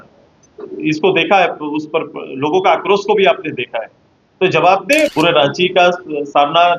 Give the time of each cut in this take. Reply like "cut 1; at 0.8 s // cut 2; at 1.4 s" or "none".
cut 1; at 5.1 s